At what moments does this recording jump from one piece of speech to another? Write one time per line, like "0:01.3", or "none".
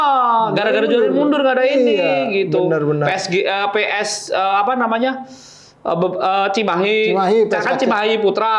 none

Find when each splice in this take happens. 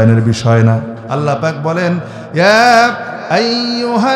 0:01.0

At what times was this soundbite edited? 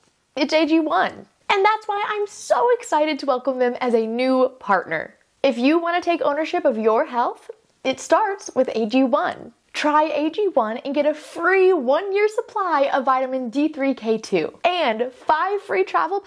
none

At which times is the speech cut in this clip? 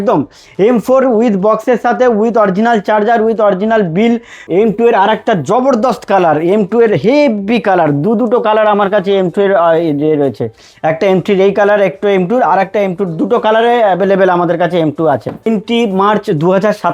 0:04.3
0:15.5

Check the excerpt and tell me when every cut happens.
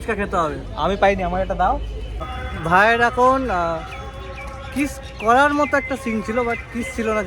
0:02.3

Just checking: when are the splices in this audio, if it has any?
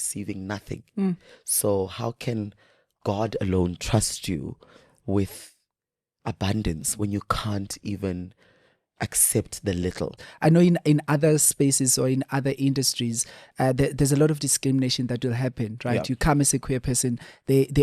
0:10.2

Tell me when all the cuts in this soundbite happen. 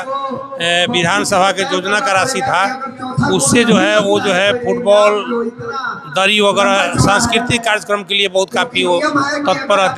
none

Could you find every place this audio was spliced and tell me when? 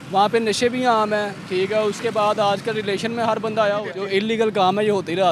0:03.9

